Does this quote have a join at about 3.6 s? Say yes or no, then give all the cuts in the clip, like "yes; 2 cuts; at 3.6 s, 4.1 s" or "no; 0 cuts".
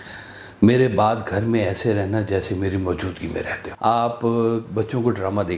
yes; 1 cut; at 3.6 s